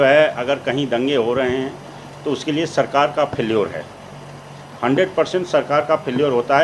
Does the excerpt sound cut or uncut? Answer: uncut